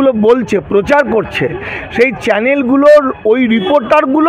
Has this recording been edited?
no; 0 cuts

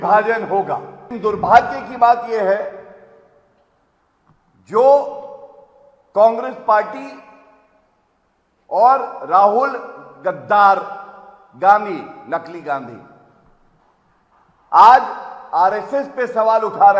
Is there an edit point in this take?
yes; 1 cut; at 1.0 s

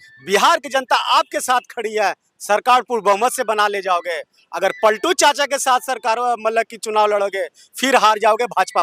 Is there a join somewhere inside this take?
no; 0 cuts

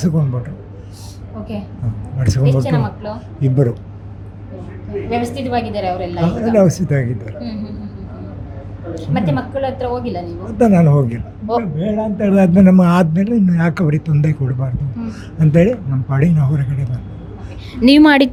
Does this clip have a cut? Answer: no; 0 cuts

